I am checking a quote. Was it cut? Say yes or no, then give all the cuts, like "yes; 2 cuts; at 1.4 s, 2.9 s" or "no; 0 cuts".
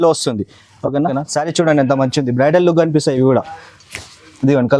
yes; 1 cut; at 1.1 s